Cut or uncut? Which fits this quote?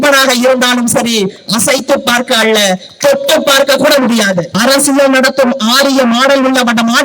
cut